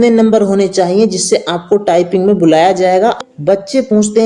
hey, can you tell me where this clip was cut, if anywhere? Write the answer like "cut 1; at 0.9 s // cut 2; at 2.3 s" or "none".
cut 1; at 3.3 s